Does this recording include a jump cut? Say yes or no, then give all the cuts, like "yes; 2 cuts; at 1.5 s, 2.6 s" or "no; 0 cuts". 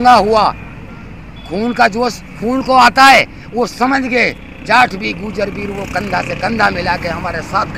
no; 0 cuts